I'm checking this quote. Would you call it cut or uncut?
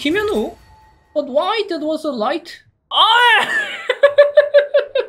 uncut